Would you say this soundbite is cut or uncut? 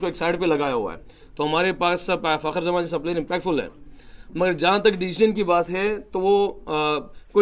uncut